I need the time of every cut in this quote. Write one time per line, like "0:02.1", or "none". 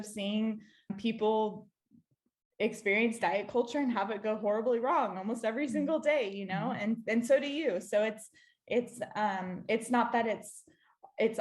0:00.9